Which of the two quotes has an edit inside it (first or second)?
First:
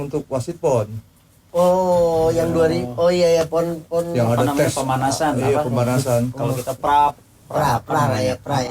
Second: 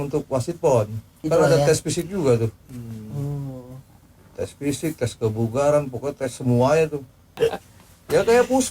second